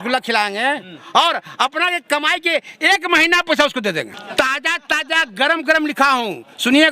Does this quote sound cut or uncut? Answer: cut